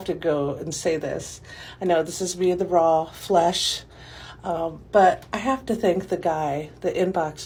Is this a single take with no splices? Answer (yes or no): yes